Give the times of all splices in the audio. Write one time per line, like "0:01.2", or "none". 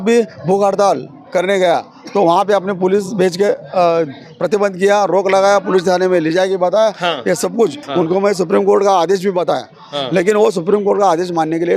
0:07.8

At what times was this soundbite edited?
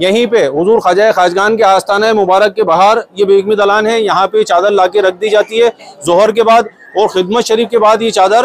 none

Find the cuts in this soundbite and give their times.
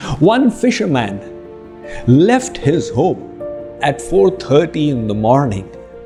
none

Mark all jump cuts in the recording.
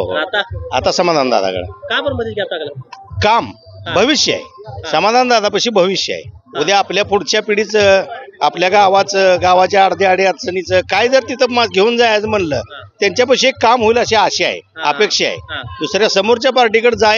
none

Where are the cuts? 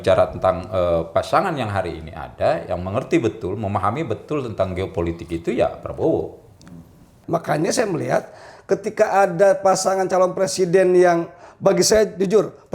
0:07.1

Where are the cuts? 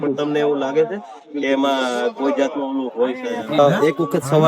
0:03.6

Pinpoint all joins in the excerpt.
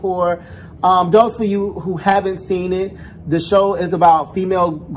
none

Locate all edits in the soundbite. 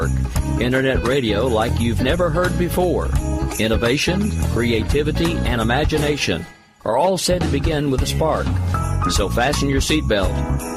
none

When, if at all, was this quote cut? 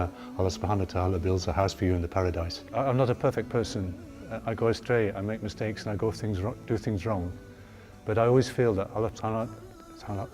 0:02.6

